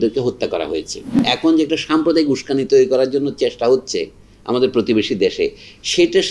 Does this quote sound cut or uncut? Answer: cut